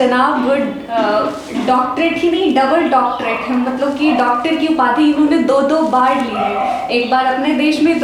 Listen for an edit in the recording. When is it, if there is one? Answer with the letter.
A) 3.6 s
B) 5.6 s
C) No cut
C